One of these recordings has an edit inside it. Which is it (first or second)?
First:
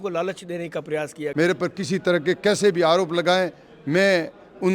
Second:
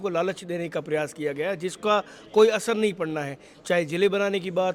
first